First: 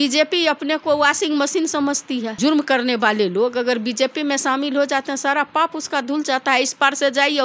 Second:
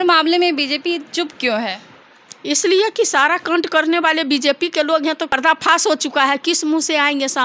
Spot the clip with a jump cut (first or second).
second